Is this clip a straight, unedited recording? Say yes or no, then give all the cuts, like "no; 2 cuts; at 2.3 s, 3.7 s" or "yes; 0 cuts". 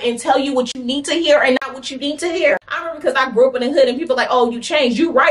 no; 1 cut; at 2.5 s